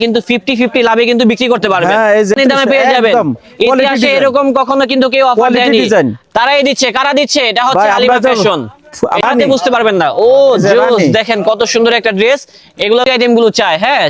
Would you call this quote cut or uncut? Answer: cut